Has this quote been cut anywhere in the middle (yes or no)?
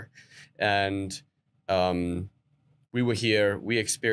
no